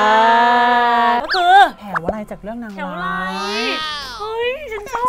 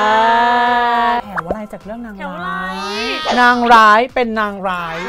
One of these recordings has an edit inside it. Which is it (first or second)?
second